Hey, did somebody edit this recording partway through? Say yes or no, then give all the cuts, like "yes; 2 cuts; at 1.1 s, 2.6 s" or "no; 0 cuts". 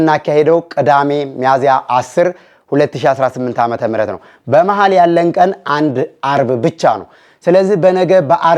no; 0 cuts